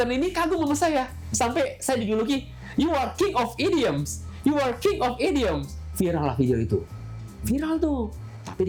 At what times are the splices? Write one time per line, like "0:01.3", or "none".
none